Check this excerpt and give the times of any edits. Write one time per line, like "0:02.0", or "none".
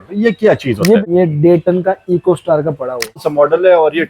0:01.0
0:03.2